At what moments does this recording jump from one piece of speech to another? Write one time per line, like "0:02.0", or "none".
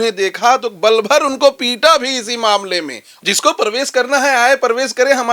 0:03.0